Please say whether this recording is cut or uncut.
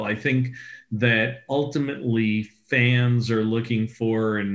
uncut